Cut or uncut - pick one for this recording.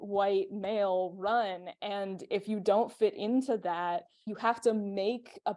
uncut